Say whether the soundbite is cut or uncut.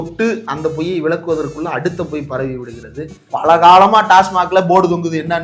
cut